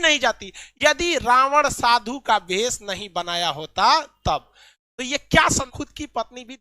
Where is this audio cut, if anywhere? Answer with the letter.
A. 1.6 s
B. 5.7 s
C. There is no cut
B